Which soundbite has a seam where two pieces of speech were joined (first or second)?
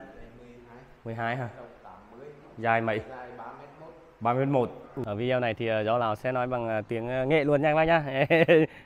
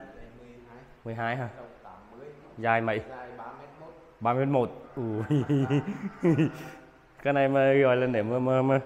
first